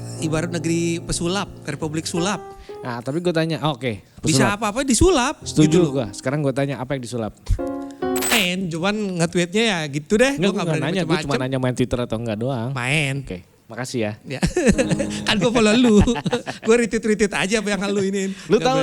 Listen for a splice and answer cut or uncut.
cut